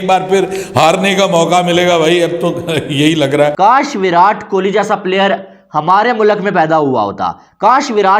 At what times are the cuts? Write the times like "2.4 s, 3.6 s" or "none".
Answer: 3.5 s